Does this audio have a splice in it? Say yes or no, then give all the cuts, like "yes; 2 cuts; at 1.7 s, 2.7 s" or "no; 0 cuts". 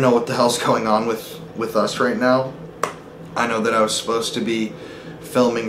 no; 0 cuts